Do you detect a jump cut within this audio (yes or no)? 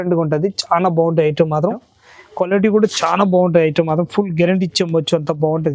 yes